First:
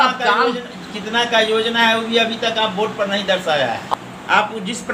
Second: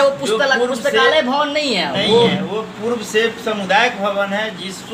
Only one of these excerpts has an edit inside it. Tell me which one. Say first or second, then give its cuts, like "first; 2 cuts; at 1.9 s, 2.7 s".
first; 1 cut; at 3.8 s